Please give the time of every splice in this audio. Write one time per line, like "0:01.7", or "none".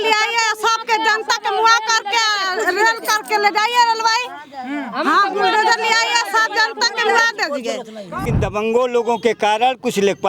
0:08.2